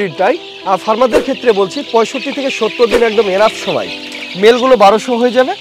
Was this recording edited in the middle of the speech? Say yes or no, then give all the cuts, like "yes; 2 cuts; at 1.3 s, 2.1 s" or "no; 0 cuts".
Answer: no; 0 cuts